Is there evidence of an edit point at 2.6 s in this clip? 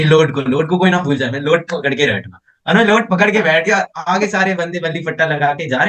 no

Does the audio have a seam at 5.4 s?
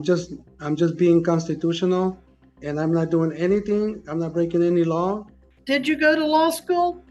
yes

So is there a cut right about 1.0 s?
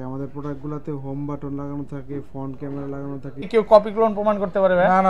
no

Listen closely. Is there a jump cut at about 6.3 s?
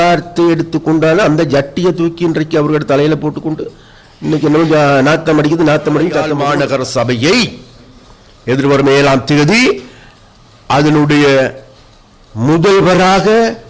yes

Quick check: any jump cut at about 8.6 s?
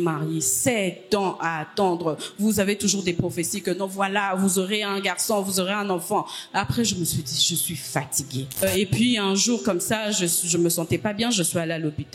yes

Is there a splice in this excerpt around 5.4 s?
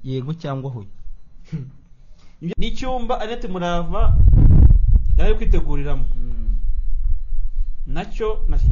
no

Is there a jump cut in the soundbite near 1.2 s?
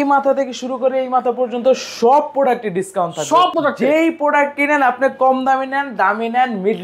no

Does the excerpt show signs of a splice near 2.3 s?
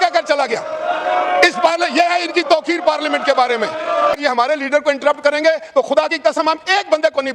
no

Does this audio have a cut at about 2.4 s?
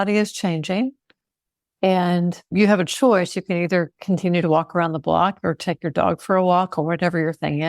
yes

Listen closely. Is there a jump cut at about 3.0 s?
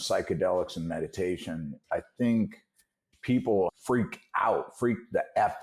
yes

